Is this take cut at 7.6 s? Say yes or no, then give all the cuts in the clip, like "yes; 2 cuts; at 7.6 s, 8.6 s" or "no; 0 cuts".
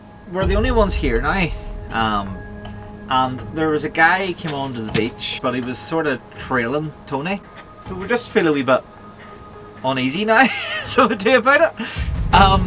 yes; 2 cuts; at 5.3 s, 7.6 s